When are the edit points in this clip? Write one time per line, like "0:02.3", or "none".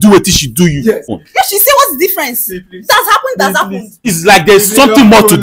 0:01.2
0:04.0